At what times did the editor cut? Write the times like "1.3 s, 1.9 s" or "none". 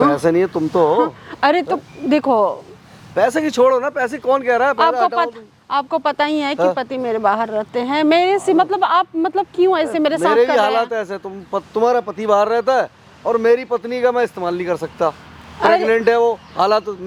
none

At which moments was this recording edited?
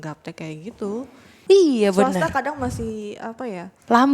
1.4 s

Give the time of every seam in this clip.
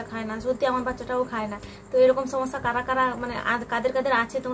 none

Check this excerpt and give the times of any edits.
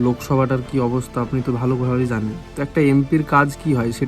2.4 s

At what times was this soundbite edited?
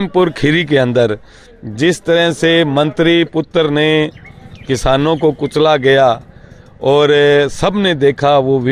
none

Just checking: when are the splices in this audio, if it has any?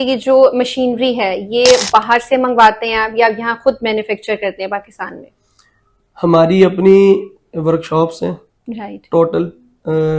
none

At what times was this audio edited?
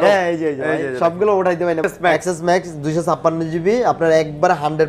1.8 s

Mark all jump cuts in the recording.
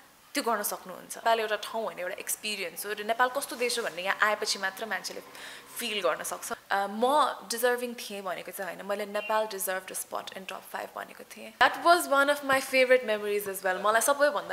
1.2 s, 6.5 s, 11.6 s

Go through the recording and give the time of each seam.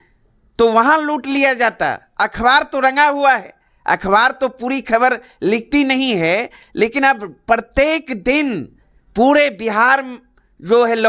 none

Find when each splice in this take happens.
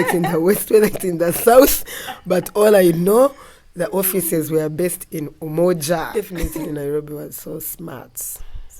6.4 s

